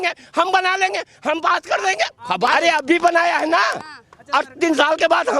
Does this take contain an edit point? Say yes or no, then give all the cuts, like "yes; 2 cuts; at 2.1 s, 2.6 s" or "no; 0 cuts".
yes; 1 cut; at 2.5 s